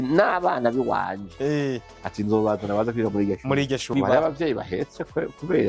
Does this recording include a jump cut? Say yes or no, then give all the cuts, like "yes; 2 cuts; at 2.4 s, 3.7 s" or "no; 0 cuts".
yes; 1 cut; at 3.9 s